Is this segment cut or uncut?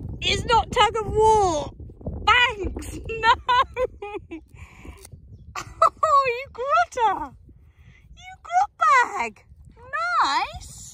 uncut